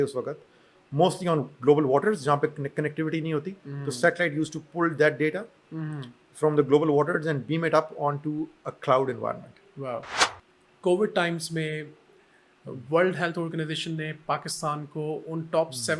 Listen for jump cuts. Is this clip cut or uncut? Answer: cut